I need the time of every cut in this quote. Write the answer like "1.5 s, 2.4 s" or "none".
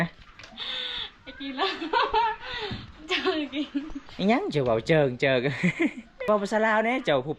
6.1 s